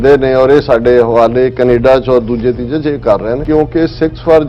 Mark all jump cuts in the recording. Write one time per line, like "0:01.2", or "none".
0:03.4